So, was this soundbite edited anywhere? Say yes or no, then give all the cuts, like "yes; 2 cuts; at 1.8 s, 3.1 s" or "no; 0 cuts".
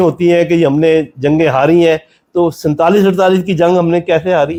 no; 0 cuts